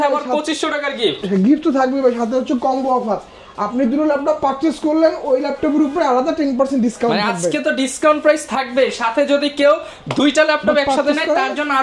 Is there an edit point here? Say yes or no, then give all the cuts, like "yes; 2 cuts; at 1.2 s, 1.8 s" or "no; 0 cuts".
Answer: no; 0 cuts